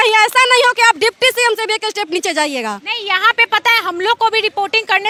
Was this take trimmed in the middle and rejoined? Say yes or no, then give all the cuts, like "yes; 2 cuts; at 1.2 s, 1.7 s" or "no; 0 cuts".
no; 0 cuts